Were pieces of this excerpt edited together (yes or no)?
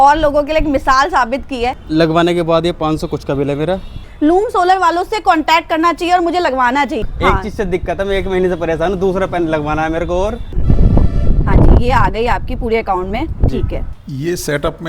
yes